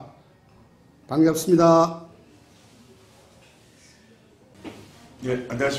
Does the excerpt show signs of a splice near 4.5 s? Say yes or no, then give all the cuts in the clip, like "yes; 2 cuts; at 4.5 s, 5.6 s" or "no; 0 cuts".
yes; 1 cut; at 4.5 s